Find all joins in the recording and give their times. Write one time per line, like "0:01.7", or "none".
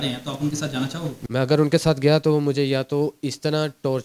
0:01.2